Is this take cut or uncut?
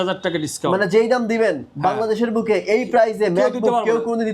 uncut